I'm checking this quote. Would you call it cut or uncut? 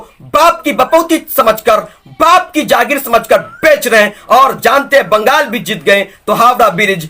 uncut